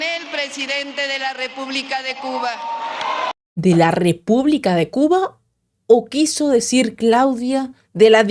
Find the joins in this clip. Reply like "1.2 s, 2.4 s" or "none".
none